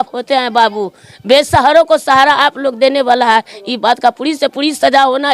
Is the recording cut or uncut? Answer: uncut